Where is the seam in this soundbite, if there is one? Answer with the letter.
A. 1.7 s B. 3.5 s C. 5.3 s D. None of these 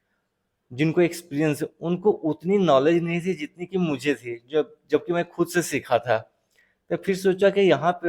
D